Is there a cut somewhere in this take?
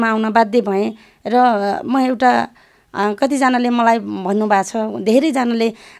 no; 0 cuts

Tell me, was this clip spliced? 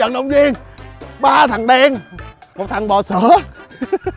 no; 0 cuts

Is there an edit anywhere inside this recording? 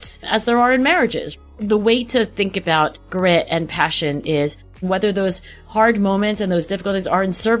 yes; 3 cuts; at 1.3 s, 3.0 s, 4.8 s

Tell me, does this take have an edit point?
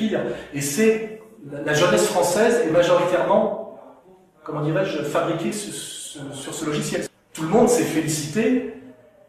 yes; 1 cut; at 7.0 s

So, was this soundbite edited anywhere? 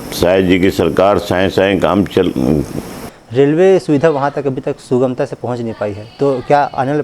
yes; 1 cut; at 3.0 s

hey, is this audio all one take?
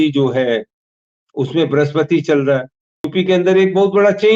no; 1 cut; at 3.1 s

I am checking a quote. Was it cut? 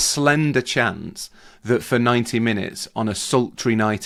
no; 0 cuts

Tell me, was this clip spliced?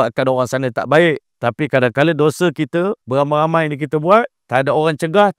yes; 3 cuts; at 1.3 s, 3.0 s, 4.4 s

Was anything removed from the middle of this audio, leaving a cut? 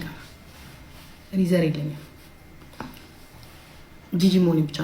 no; 0 cuts

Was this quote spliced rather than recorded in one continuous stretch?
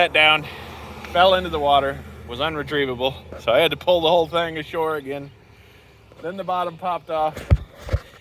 no; 0 cuts

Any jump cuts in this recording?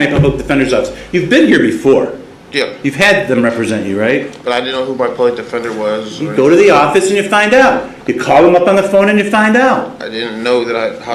no; 0 cuts

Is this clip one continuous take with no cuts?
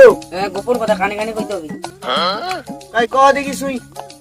yes; 0 cuts

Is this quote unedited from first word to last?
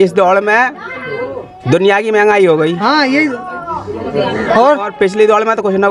yes; 0 cuts

